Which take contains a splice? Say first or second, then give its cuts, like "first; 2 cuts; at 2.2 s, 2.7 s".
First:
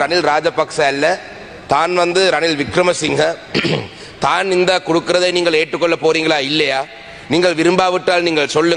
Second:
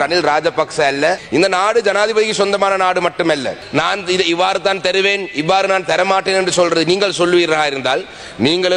second; 2 cuts; at 1.2 s, 3.6 s